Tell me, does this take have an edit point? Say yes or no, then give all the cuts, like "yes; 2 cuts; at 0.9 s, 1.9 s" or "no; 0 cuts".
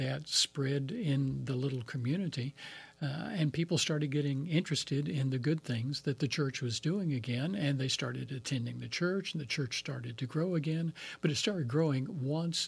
no; 0 cuts